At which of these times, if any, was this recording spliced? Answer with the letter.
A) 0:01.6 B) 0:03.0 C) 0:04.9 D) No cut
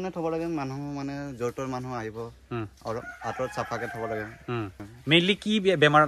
C